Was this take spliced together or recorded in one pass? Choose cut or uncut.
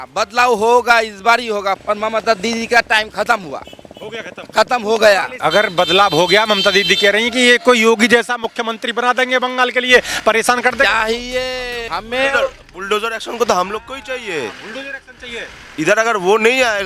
cut